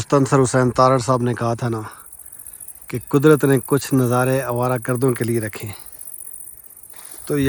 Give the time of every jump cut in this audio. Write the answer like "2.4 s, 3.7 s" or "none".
none